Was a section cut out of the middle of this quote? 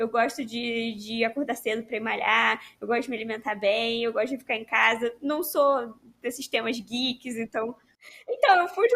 yes; 1 cut; at 7.8 s

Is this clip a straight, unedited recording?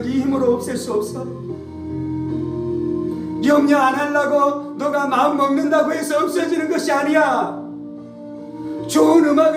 yes; 0 cuts

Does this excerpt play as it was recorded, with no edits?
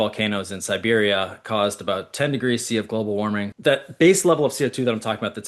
no; 1 cut; at 3.5 s

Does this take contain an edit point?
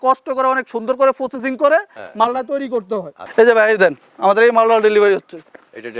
yes; 1 cut; at 3.2 s

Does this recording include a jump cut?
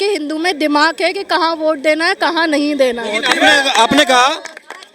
no; 0 cuts

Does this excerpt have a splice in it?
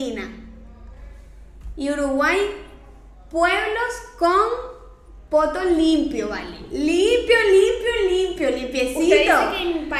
no; 0 cuts

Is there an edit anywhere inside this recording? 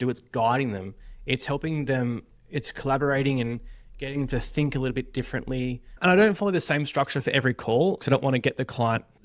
yes; 2 cuts; at 6.0 s, 8.0 s

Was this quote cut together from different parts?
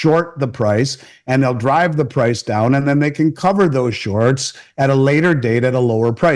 no; 0 cuts

